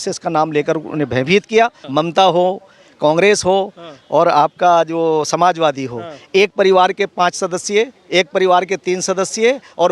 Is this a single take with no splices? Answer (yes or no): no